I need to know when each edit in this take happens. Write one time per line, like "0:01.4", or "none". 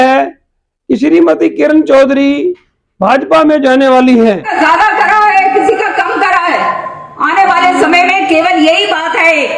0:04.5